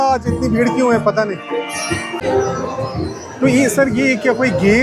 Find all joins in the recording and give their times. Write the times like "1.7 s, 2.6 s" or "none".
2.1 s